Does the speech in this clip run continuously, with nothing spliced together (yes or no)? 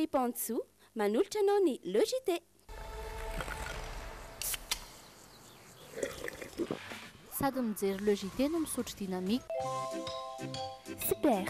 no